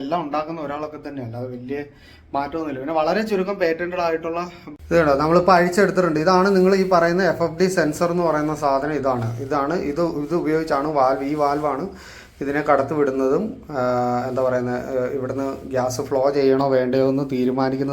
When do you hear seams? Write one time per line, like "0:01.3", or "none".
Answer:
0:04.6